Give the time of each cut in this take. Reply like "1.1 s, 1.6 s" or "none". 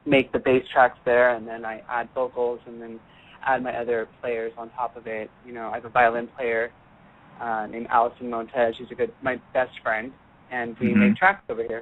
none